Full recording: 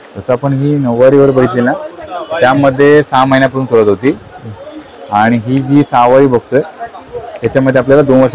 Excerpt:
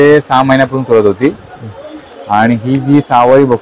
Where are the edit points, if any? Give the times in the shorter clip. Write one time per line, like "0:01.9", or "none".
none